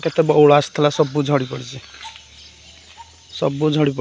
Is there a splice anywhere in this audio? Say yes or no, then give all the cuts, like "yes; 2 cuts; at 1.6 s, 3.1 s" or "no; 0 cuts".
no; 0 cuts